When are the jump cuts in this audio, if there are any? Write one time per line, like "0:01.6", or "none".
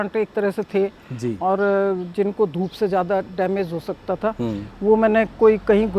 none